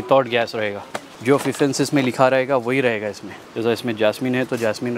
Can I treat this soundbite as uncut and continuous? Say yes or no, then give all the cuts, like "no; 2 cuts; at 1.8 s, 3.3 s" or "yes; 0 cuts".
yes; 0 cuts